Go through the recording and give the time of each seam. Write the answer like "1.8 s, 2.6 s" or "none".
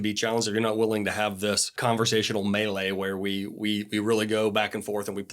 1.7 s